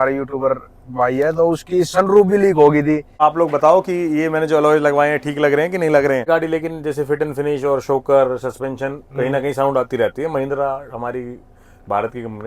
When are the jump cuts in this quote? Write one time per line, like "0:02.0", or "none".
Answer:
0:03.1
0:06.3